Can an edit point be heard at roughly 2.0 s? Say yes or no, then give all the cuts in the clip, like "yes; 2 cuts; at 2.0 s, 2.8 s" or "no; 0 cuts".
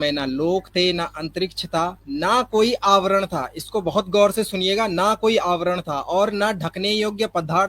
yes; 1 cut; at 2.0 s